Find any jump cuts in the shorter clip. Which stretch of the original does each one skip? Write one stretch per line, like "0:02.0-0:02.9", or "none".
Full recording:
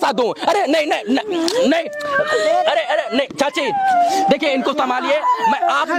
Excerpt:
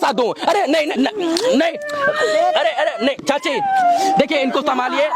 0:00.9-0:01.0